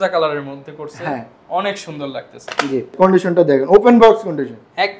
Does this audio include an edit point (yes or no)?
yes